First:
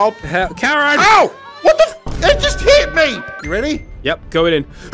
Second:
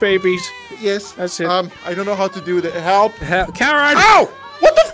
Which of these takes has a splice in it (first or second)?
first